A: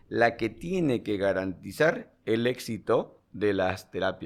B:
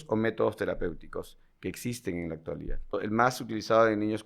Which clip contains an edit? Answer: B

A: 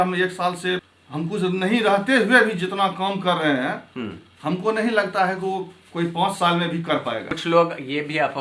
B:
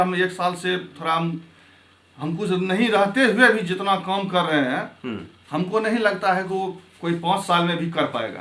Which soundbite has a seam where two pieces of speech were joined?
A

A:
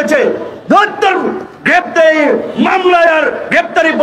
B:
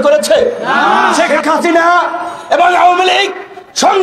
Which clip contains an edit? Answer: B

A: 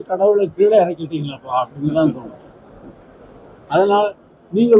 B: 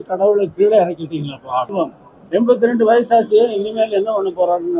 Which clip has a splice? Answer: B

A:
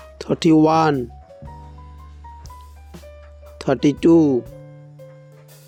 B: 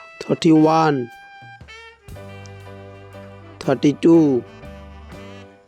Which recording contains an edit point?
B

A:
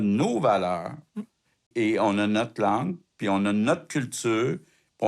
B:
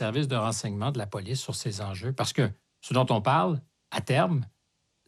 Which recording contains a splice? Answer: A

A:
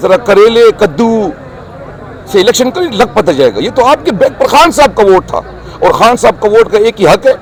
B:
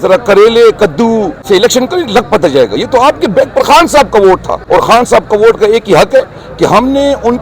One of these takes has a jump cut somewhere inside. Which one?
B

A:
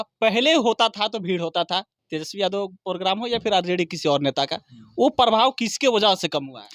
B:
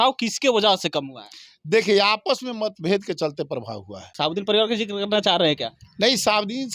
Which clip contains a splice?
B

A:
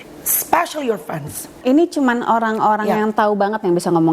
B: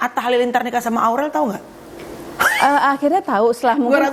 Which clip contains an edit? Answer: A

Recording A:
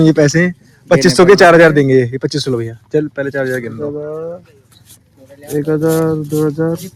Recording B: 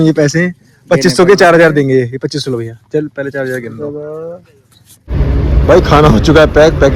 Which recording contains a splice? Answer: B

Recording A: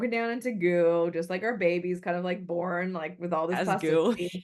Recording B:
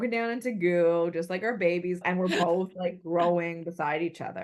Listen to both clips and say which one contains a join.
B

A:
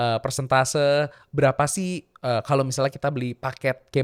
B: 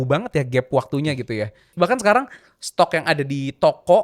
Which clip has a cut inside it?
B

